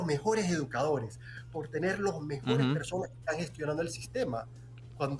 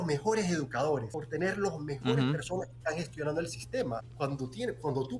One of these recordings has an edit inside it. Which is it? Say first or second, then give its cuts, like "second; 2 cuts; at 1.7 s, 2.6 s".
second; 2 cuts; at 1.2 s, 4.1 s